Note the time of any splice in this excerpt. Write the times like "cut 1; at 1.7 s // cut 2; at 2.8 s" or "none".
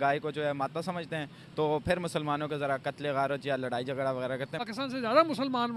cut 1; at 4.6 s